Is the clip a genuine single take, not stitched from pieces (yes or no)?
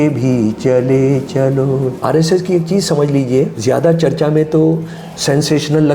no